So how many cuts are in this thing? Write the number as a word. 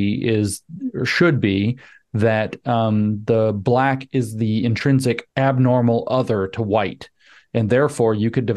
one